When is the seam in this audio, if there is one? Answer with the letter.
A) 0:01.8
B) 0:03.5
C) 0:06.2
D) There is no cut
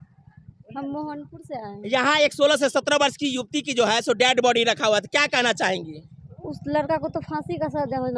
D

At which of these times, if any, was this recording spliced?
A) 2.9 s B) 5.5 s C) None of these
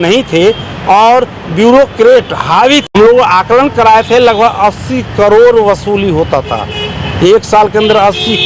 A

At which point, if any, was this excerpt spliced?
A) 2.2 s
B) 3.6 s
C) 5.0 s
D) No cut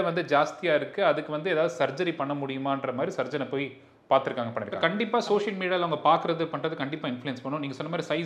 C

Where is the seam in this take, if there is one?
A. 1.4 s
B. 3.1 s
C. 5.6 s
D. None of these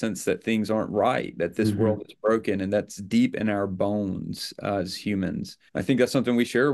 C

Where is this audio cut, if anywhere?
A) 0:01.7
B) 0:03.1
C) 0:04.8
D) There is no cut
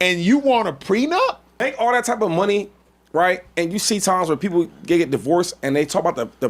A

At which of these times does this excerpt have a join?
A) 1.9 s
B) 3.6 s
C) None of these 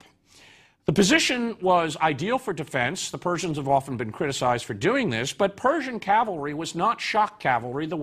C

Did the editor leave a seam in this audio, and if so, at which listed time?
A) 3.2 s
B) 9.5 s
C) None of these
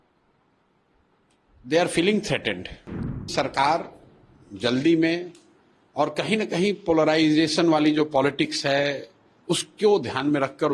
A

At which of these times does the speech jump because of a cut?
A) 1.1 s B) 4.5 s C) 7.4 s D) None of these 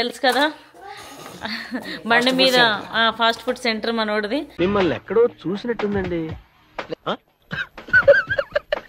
D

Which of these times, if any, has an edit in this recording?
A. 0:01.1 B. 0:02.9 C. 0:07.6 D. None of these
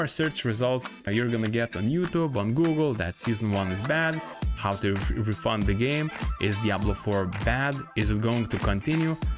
A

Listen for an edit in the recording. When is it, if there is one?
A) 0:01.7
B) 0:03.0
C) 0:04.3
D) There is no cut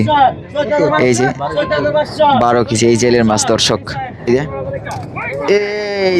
C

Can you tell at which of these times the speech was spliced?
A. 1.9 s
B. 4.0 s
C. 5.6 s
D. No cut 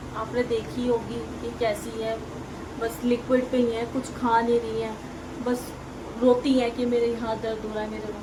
D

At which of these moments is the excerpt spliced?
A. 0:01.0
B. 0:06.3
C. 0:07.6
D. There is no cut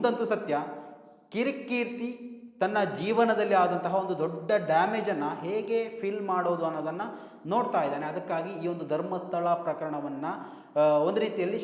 D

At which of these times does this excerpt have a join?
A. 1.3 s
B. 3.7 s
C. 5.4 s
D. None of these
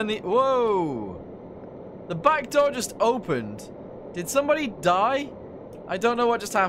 D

